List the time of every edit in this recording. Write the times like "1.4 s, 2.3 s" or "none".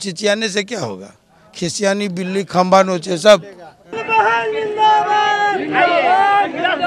3.9 s